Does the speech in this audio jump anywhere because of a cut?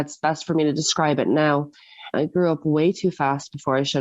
yes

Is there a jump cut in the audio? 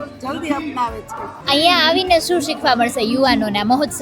yes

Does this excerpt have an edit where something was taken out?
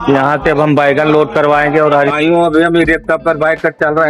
yes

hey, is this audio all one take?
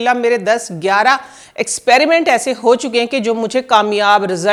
yes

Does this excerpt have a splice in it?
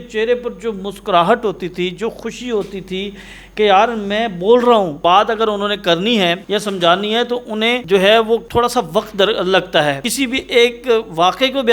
yes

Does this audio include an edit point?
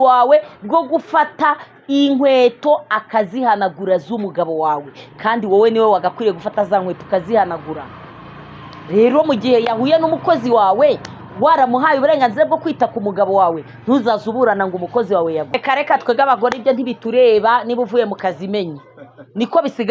yes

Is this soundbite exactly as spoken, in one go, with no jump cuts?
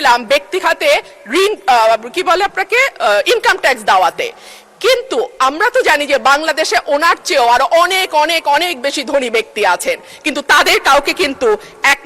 yes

